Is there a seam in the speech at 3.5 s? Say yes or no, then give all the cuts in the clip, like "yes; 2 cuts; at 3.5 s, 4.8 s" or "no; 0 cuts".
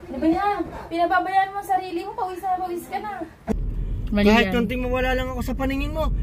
yes; 1 cut; at 3.5 s